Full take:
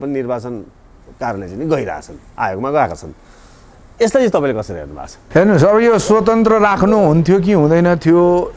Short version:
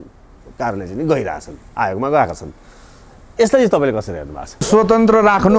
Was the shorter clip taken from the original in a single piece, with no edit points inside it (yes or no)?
no